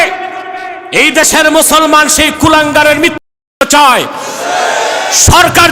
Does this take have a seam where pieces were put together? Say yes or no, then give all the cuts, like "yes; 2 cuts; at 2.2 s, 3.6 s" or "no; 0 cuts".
no; 0 cuts